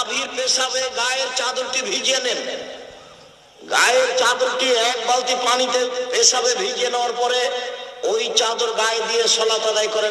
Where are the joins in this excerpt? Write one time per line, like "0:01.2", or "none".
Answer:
none